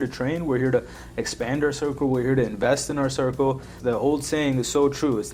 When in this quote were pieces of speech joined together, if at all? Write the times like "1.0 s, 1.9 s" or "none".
3.7 s